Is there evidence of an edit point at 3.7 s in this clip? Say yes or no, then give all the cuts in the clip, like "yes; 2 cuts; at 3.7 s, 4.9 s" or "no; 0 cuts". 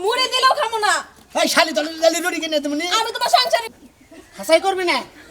yes; 1 cut; at 3.7 s